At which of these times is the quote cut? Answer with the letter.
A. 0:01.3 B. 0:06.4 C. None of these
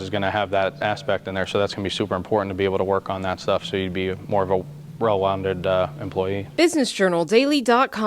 B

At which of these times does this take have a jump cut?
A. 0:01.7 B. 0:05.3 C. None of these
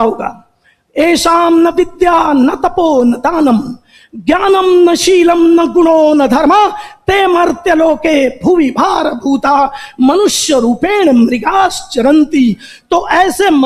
C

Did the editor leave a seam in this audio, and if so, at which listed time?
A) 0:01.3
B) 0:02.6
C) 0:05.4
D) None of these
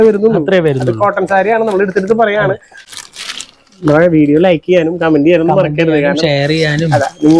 D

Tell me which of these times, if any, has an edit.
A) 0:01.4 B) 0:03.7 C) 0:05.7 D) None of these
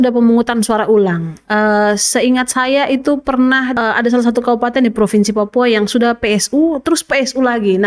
B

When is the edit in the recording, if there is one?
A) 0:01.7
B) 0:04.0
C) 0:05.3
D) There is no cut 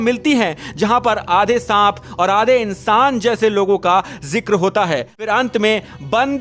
C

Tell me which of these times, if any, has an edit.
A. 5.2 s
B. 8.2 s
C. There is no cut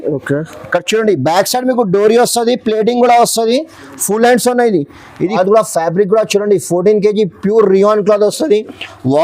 A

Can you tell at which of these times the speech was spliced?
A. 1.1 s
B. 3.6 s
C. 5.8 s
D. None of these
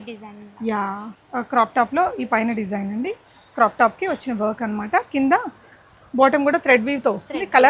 A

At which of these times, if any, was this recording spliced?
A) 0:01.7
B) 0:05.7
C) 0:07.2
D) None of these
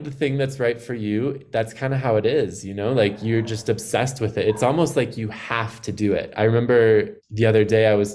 C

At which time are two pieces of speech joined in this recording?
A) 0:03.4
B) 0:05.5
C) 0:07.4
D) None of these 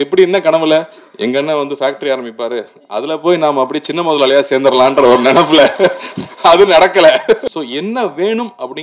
C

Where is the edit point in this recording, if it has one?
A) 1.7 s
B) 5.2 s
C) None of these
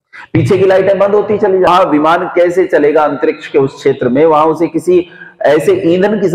A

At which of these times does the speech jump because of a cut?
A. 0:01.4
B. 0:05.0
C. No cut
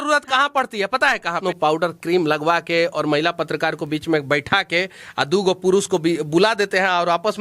A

